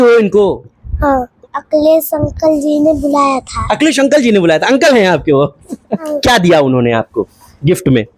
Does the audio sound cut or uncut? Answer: cut